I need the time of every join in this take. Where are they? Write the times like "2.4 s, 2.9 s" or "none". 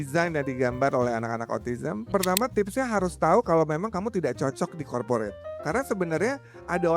2.1 s, 5.6 s